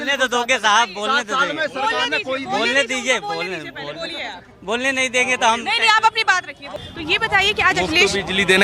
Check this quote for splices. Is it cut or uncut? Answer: cut